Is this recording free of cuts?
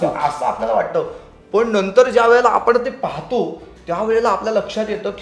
yes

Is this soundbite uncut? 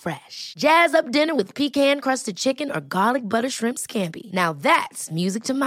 yes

